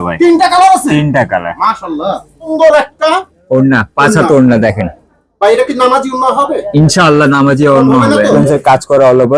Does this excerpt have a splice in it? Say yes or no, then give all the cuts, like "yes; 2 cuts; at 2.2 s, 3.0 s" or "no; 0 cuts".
yes; 2 cuts; at 2.5 s, 8.4 s